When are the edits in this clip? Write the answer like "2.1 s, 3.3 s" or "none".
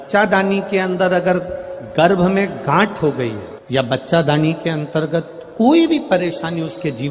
none